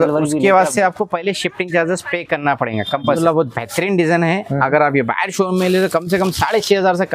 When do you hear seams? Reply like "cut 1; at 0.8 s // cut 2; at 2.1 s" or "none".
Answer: cut 1; at 3.1 s

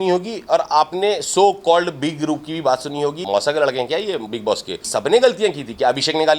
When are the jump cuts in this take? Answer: cut 1; at 3.2 s // cut 2; at 4.8 s

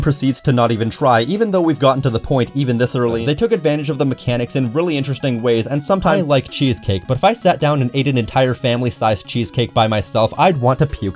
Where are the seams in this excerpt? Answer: cut 1; at 3.2 s // cut 2; at 6.1 s

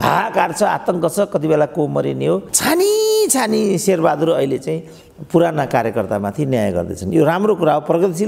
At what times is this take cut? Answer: cut 1; at 2.5 s

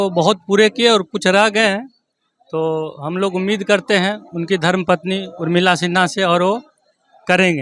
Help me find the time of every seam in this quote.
none

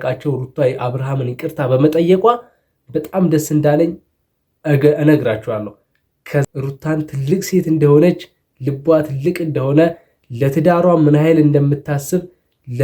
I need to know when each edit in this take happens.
cut 1; at 6.5 s

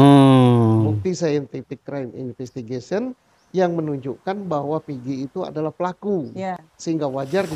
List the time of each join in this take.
cut 1; at 1.0 s

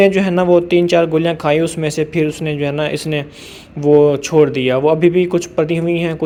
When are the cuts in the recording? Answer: none

